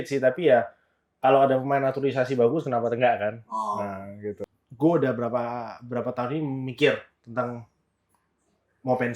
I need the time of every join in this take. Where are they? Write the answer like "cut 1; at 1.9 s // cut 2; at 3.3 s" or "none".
cut 1; at 4.4 s